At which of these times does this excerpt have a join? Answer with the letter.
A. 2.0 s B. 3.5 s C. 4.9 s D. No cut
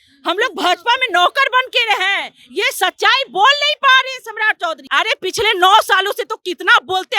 C